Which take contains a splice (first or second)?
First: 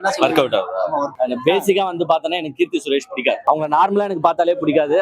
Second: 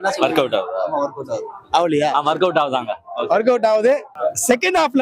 first